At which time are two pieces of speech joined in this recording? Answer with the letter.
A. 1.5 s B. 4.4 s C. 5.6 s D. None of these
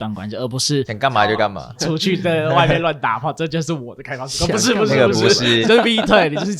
C